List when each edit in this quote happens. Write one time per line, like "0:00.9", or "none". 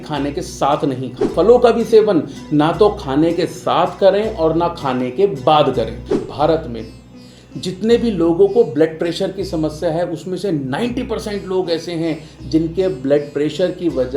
0:01.3
0:06.2